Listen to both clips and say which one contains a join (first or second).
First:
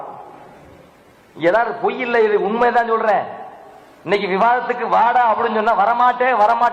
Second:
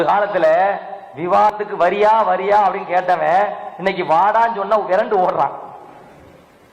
second